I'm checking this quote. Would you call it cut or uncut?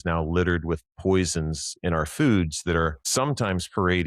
cut